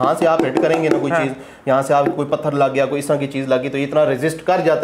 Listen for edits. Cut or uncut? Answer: uncut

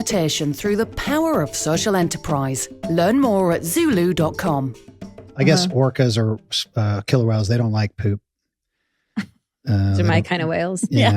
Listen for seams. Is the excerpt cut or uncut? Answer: cut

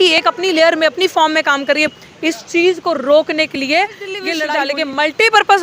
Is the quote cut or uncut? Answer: cut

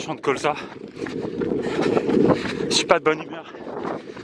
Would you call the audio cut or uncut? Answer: uncut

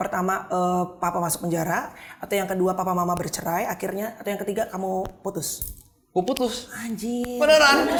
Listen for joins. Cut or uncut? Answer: uncut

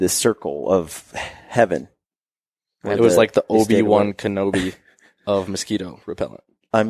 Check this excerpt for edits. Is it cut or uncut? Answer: uncut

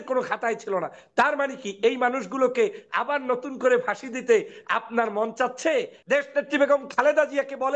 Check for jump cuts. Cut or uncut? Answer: cut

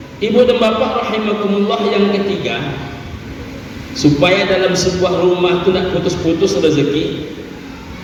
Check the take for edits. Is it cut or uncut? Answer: uncut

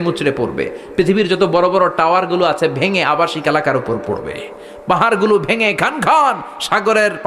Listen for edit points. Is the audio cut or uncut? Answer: uncut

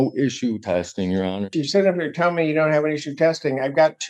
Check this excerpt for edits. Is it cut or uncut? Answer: cut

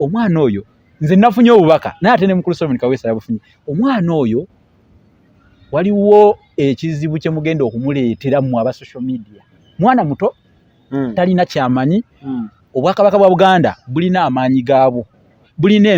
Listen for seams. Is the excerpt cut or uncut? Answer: uncut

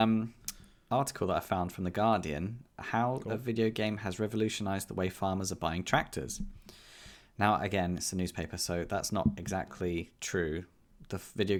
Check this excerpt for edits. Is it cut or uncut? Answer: uncut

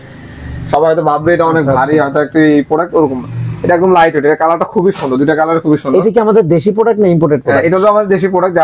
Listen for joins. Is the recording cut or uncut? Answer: uncut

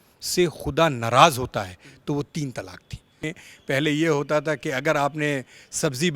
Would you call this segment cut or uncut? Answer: cut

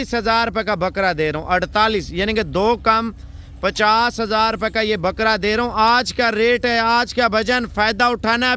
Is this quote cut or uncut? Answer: uncut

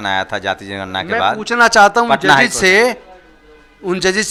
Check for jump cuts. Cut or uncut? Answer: uncut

